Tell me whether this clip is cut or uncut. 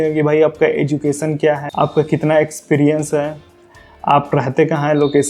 cut